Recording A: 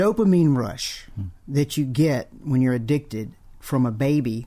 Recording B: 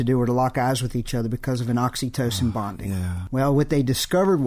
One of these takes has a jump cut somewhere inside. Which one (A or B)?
B